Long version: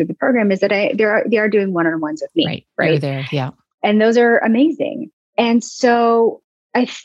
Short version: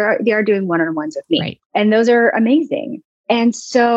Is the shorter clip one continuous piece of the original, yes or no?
no